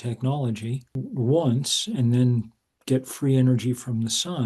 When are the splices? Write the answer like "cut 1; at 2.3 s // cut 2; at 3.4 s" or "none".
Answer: cut 1; at 1.0 s